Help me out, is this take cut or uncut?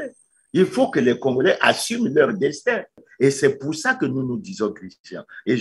cut